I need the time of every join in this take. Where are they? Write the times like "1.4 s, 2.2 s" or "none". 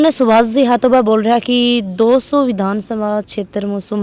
none